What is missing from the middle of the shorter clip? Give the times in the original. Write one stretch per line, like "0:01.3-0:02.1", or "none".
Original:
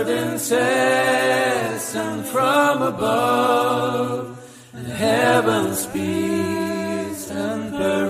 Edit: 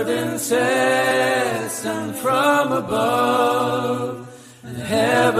0:01.1-0:01.2